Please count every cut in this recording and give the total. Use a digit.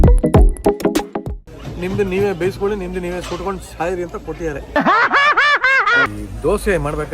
2